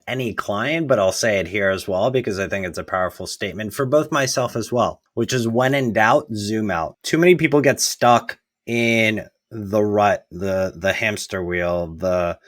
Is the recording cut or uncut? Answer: cut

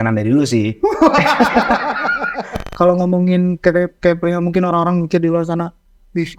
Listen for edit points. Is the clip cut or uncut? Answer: cut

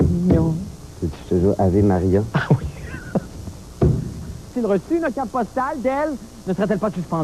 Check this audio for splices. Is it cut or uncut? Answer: uncut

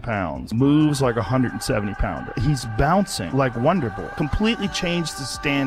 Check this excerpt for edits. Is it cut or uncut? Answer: uncut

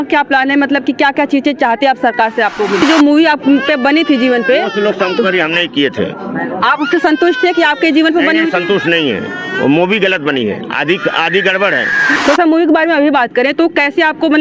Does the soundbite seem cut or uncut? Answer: cut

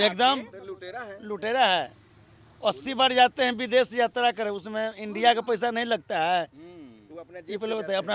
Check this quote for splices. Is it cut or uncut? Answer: uncut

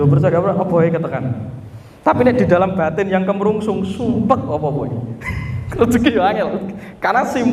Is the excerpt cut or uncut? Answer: uncut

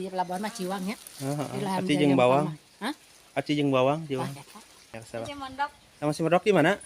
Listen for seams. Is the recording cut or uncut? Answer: cut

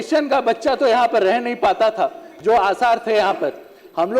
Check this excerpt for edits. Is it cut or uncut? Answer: uncut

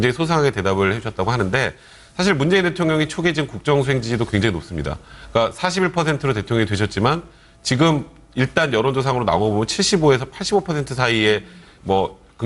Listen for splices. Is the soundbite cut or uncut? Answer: uncut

